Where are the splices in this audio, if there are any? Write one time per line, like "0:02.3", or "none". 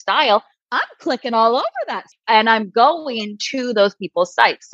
0:02.1